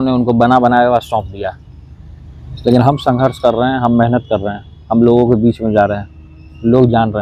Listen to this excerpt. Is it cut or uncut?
uncut